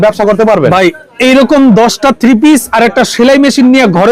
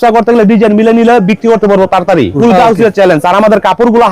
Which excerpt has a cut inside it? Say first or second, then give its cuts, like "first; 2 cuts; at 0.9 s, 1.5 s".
second; 1 cut; at 2.3 s